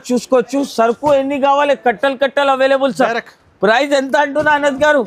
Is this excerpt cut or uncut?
uncut